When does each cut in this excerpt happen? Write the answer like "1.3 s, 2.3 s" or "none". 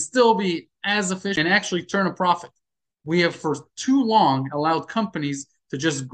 1.3 s